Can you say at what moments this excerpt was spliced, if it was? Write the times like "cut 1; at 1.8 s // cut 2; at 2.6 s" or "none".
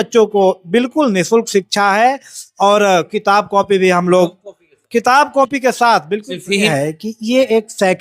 cut 1; at 6.7 s